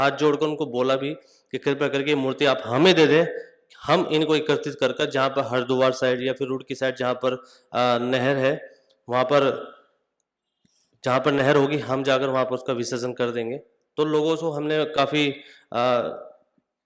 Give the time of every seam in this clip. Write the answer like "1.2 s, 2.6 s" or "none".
none